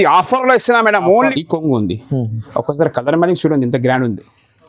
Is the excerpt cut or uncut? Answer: cut